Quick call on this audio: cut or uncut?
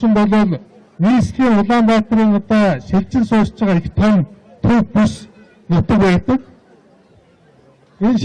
cut